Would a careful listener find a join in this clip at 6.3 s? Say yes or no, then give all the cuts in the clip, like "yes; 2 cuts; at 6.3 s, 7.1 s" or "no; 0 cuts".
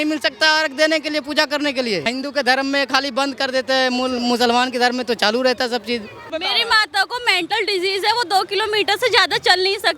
yes; 2 cuts; at 2.1 s, 6.3 s